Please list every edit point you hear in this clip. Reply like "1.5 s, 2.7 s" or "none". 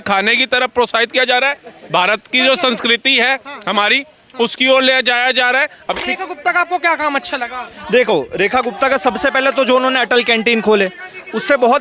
5.9 s